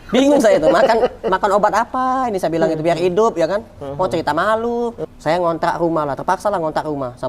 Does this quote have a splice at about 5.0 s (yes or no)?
yes